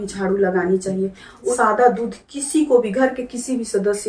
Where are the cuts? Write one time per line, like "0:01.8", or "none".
0:01.6